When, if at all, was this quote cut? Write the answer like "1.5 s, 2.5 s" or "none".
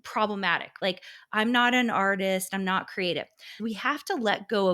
0.8 s, 3.6 s